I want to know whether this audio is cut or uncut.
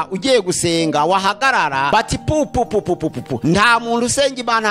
cut